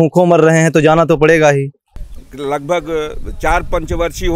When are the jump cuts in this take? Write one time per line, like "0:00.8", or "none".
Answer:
0:01.8

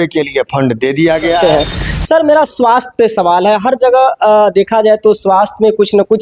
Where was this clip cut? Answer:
0:01.4

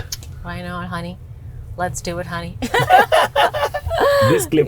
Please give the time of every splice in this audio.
none

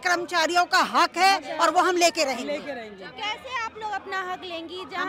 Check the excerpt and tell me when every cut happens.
none

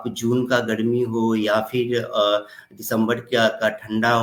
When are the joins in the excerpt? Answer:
none

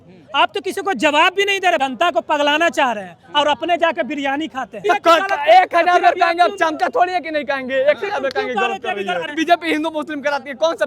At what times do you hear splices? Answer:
0:01.8
0:04.8
0:09.3

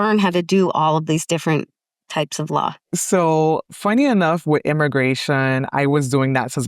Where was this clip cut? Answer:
0:02.8

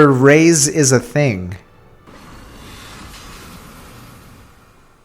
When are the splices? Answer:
0:02.0

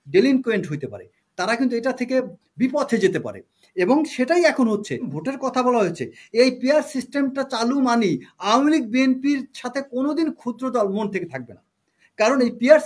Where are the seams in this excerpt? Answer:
0:05.2

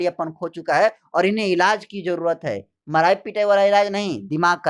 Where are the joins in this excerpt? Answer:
none

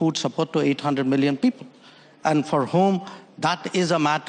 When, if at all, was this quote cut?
none

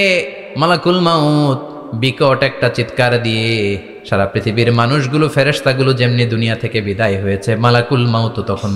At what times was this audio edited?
0:03.9

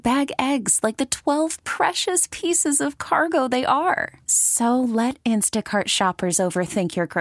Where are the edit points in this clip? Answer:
none

